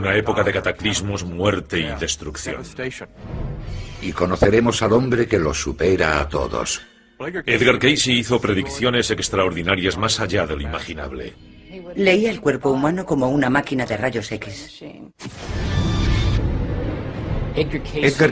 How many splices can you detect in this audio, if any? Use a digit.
0